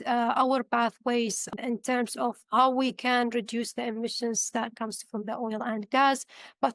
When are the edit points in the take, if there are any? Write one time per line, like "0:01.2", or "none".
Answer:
0:01.5